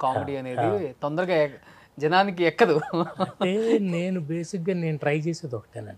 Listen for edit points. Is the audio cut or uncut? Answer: uncut